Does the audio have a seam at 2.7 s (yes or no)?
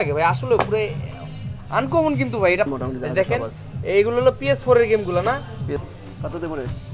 yes